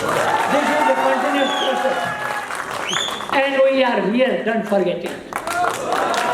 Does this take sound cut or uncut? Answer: uncut